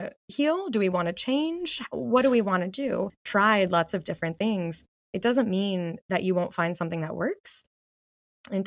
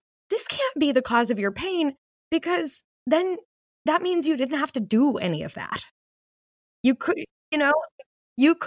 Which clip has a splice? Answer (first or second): first